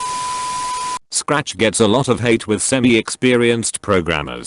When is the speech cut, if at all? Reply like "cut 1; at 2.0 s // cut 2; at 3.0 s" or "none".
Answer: cut 1; at 1.0 s